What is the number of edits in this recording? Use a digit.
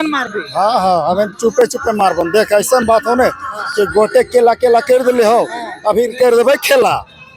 0